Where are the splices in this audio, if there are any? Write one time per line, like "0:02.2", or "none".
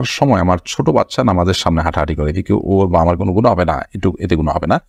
none

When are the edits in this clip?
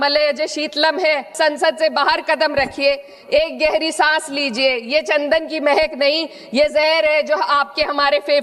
0:01.3

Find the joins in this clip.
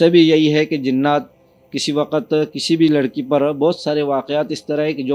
none

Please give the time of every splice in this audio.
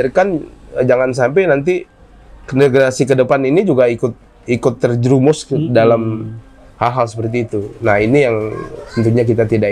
none

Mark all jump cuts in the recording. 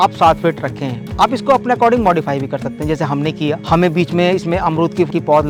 none

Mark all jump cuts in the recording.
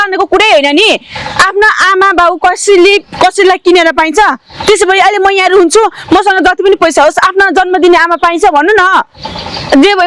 none

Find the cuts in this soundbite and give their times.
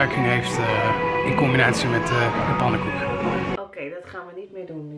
0:03.6

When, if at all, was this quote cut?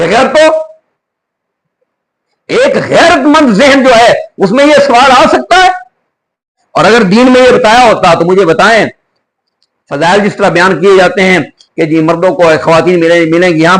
0:06.6

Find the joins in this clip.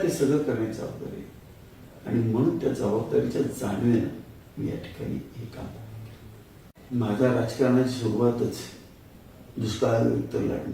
0:06.8

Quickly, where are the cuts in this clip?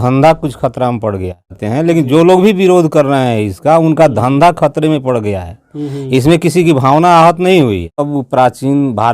0:08.1

